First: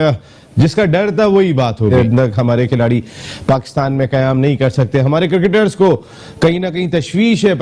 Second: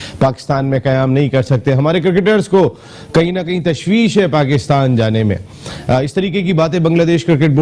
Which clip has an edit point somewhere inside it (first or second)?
first